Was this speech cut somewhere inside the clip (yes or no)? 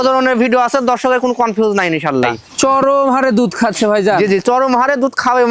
yes